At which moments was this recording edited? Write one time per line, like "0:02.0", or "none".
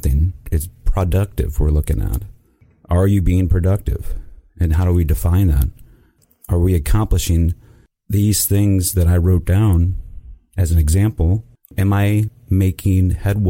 0:02.6
0:06.2
0:11.7

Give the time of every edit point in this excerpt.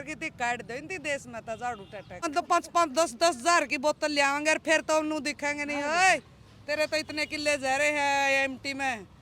0:02.2

